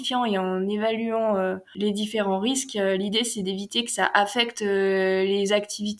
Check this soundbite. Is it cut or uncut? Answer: uncut